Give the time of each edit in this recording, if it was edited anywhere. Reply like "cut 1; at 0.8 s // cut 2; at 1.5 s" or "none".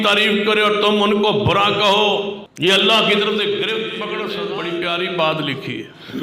cut 1; at 2.4 s // cut 2; at 4.2 s